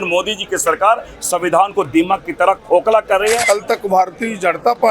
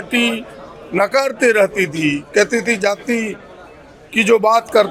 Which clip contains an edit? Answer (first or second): first